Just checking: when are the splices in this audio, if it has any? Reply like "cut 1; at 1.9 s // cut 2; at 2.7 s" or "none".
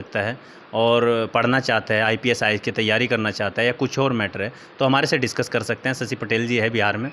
none